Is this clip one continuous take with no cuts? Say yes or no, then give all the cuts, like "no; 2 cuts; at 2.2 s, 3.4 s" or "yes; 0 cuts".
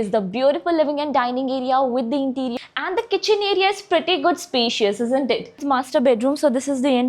no; 2 cuts; at 2.6 s, 5.6 s